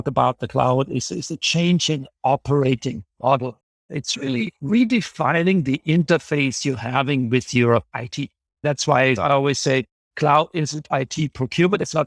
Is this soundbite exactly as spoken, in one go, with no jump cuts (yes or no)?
yes